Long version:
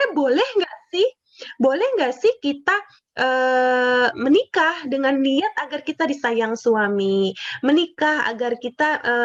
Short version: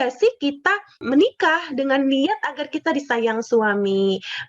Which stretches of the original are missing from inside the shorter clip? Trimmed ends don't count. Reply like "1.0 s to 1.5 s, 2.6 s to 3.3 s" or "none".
3.0 s to 4.2 s